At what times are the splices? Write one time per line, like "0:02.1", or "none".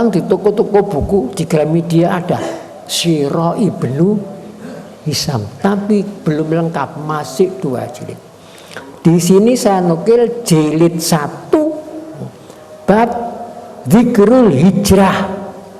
none

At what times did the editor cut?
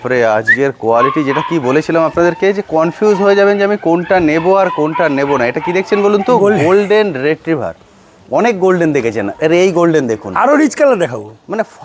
none

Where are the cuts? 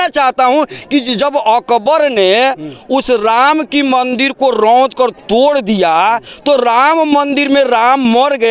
none

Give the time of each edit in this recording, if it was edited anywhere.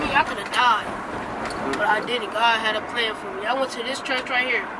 none

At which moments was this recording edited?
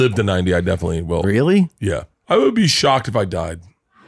0:01.2
0:02.1

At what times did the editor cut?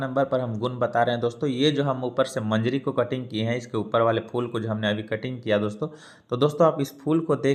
none

